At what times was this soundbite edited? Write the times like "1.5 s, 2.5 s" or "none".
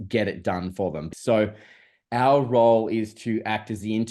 1.1 s